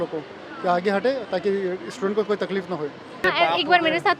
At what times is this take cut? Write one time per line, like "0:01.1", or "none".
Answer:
0:03.3